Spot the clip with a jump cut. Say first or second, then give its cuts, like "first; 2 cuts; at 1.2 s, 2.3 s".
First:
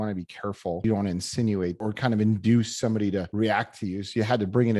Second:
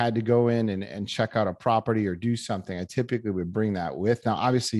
first; 3 cuts; at 0.8 s, 1.8 s, 3.3 s